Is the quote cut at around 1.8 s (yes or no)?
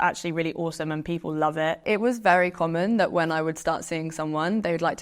yes